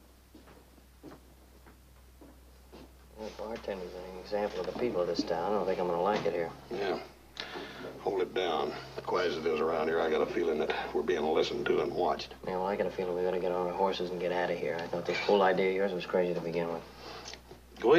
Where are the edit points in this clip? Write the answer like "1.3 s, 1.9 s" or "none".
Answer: 8.9 s